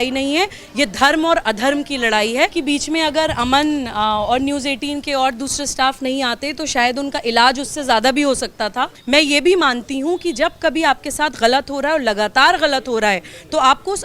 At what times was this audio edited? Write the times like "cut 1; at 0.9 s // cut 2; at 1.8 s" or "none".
cut 1; at 2.6 s // cut 2; at 9.0 s